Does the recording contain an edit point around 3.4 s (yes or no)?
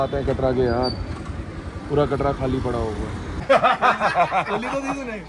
yes